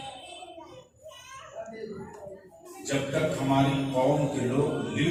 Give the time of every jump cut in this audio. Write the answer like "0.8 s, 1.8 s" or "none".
none